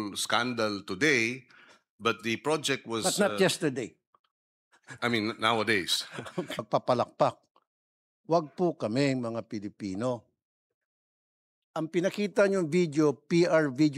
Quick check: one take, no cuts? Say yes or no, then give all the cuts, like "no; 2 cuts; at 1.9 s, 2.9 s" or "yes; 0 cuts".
no; 1 cut; at 6.6 s